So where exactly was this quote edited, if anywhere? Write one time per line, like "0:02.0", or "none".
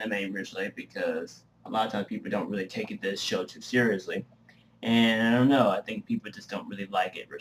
0:01.5